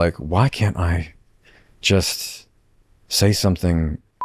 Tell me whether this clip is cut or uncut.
uncut